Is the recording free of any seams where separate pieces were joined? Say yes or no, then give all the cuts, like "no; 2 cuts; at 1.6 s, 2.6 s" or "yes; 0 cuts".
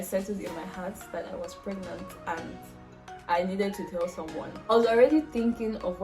no; 1 cut; at 4.7 s